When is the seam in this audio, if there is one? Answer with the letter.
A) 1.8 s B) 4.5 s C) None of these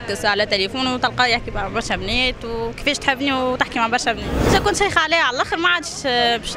B